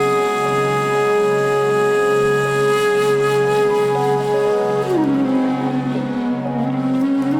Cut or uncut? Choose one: uncut